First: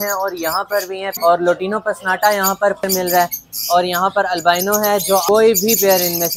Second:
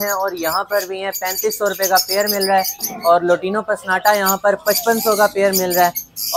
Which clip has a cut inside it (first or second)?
first